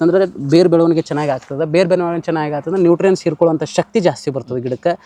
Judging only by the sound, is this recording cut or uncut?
uncut